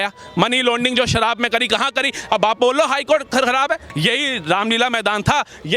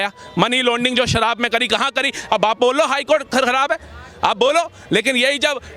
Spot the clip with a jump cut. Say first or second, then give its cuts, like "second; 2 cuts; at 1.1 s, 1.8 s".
first; 1 cut; at 3.9 s